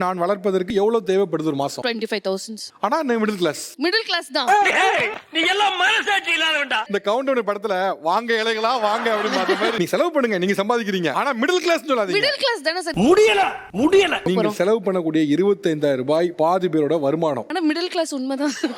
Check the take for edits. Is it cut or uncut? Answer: uncut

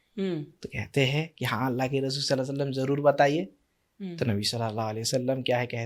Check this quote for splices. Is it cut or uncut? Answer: uncut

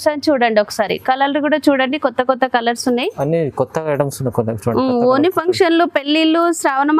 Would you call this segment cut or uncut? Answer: uncut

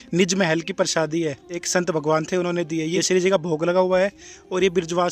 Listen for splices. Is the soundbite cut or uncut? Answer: cut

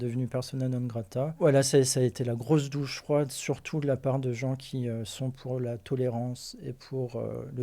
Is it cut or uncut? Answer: uncut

